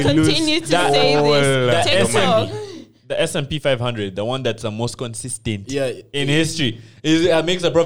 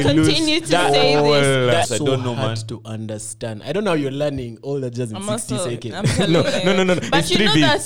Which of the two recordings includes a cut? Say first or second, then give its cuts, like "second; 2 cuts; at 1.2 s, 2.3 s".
second; 1 cut; at 1.9 s